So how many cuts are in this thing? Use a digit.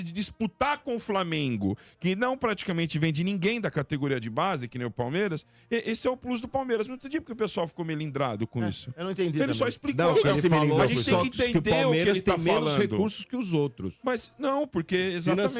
0